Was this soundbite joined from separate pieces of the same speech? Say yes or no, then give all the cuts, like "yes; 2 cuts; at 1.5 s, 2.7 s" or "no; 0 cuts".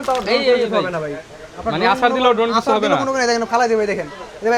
no; 0 cuts